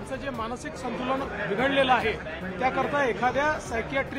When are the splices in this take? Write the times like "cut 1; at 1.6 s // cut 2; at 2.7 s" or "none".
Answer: none